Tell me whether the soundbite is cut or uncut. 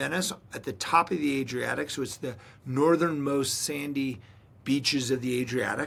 uncut